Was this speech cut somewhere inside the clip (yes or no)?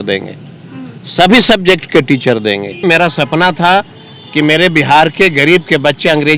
yes